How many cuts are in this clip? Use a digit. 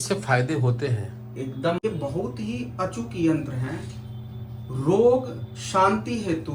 1